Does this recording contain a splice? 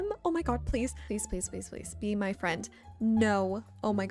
no; 0 cuts

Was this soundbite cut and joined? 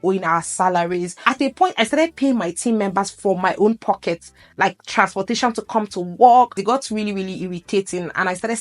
yes; 2 cuts; at 1.1 s, 6.6 s

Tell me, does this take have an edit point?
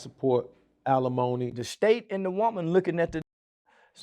yes; 1 cut; at 1.6 s

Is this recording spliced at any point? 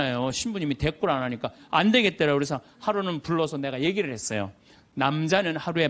no; 0 cuts

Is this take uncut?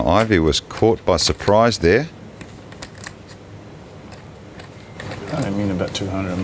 yes; 0 cuts

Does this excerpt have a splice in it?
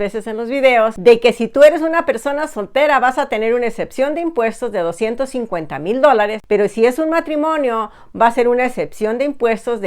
no; 0 cuts

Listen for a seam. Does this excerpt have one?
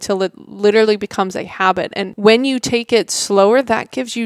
yes; 1 cut; at 2.0 s

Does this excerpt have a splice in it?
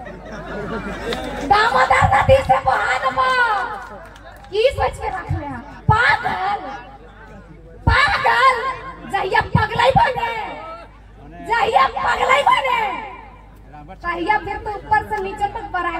no; 0 cuts

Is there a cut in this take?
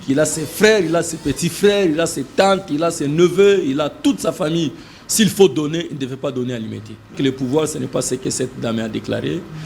yes; 1 cut; at 7.2 s

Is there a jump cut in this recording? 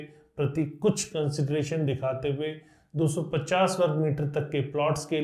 no; 0 cuts

